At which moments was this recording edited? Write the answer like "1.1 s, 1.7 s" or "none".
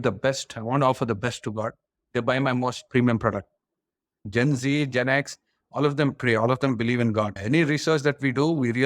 4.1 s